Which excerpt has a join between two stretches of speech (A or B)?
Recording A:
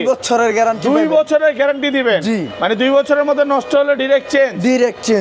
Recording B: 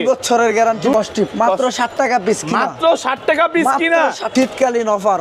B